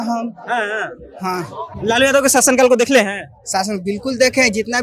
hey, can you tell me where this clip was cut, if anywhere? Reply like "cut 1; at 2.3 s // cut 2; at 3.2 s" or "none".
none